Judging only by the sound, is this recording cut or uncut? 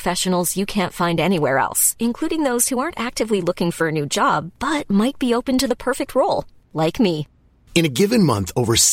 uncut